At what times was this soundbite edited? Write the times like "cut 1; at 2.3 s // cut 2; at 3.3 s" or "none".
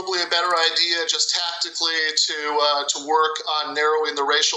none